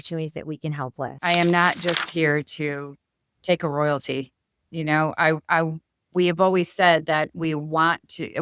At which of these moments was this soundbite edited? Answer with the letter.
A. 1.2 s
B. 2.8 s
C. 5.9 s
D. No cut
A